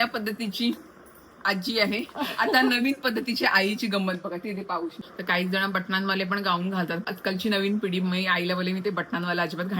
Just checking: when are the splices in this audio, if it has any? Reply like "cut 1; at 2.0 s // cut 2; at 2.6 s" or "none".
cut 1; at 5.0 s // cut 2; at 7.0 s